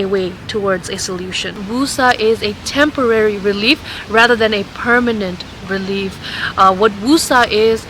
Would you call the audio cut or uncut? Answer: cut